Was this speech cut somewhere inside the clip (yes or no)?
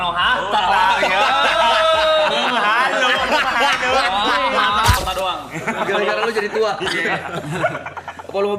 yes